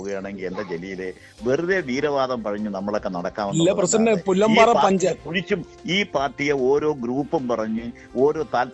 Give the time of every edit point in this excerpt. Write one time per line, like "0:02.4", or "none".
0:06.8